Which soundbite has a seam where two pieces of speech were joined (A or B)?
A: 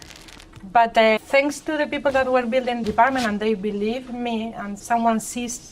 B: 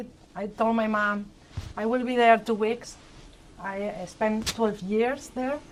A